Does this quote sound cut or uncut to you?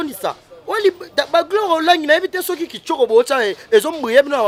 uncut